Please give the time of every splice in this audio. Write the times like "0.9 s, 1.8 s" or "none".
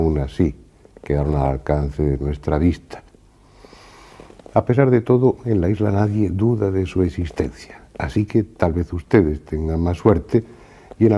6.9 s